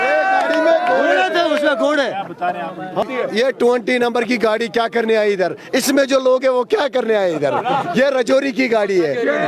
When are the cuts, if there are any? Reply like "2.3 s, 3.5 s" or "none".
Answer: 3.0 s